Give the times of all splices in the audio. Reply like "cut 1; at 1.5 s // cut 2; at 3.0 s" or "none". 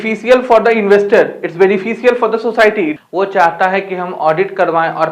cut 1; at 3.0 s